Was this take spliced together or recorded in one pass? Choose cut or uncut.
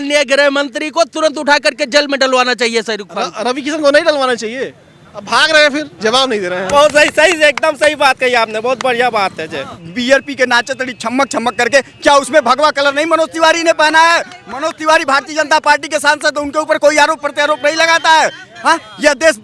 cut